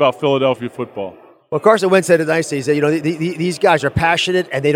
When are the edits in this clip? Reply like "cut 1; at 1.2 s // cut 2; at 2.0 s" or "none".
none